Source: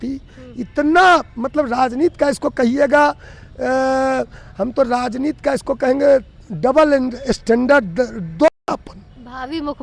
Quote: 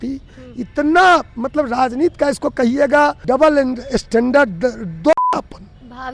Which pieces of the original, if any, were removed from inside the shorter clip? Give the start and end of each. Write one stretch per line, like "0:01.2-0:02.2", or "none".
0:03.2-0:06.5

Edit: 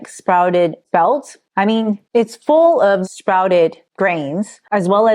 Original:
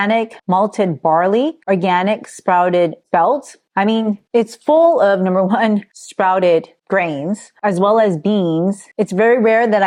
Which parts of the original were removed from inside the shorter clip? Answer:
0:05.2-0:06.0

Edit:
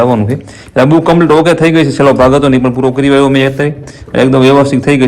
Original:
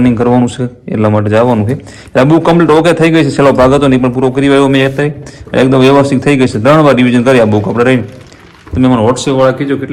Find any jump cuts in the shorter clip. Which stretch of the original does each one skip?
none

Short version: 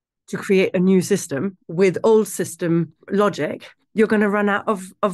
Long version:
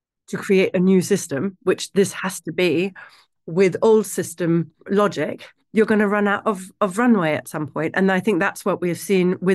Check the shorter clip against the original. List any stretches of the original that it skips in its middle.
0:01.5-0:03.3

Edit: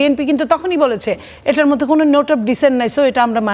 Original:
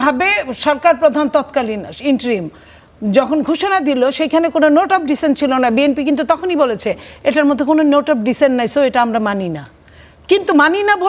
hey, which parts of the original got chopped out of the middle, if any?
none

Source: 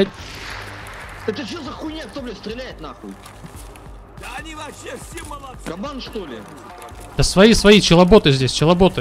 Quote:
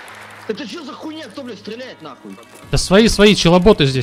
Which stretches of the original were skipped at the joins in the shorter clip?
0:03.3-0:07.0

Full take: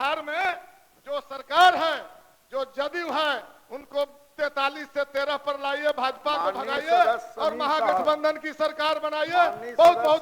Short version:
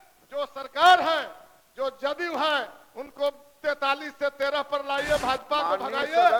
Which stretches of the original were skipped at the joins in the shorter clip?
none

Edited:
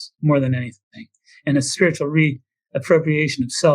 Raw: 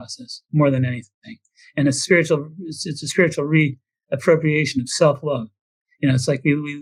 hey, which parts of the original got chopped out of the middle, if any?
0:02.0-0:03.1

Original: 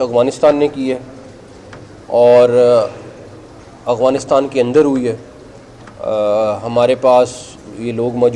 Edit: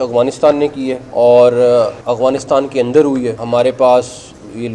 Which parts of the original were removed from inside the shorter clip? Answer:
0:01.0-0:02.0
0:02.9-0:03.8
0:05.2-0:06.6

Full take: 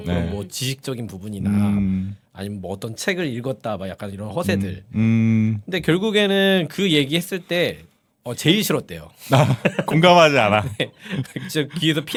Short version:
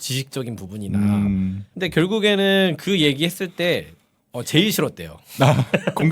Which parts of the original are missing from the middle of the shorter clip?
0:02.3-0:05.7

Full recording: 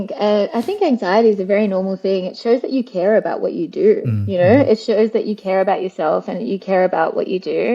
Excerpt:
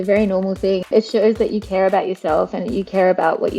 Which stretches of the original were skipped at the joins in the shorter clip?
0:02.3-0:04.7

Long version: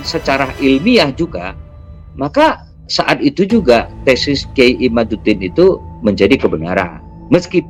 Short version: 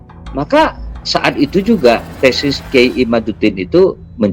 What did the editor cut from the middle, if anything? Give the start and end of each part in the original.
none

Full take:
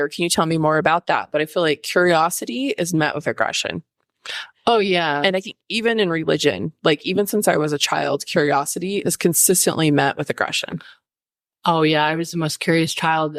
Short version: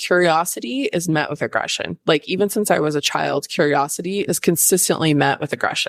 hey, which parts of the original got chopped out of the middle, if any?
0:03.8-0:06.7

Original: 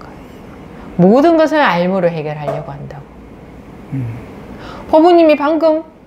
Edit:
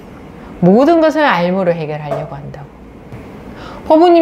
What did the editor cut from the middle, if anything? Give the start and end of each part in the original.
0:03.5-0:04.2

